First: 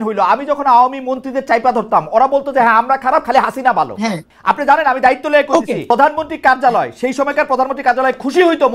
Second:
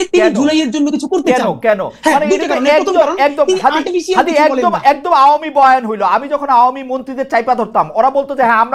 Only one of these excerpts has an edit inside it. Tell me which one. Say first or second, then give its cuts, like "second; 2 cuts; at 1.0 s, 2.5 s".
first; 2 cuts; at 4.3 s, 5.9 s